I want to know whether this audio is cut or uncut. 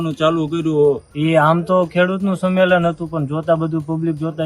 cut